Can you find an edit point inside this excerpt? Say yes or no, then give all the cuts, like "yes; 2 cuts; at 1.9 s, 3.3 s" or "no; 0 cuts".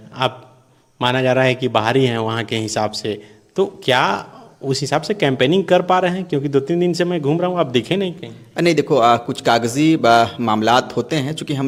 no; 0 cuts